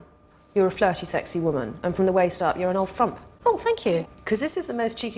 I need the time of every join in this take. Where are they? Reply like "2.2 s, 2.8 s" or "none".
none

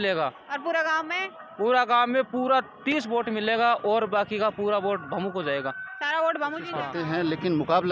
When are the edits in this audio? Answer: 6.8 s

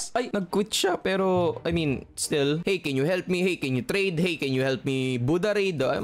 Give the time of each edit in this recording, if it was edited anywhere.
2.6 s

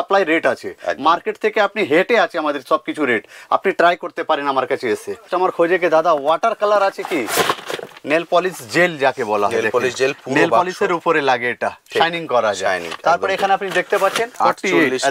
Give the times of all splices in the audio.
5.3 s, 14.4 s

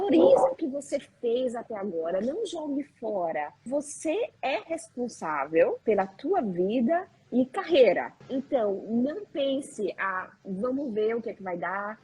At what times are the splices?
3.6 s, 5.8 s, 8.2 s

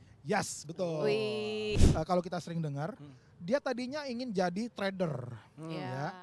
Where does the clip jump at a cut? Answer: 1.7 s

